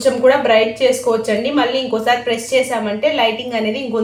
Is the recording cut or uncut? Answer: uncut